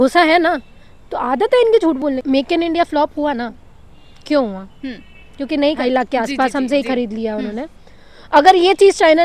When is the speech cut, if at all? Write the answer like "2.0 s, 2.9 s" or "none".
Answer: 2.2 s, 5.8 s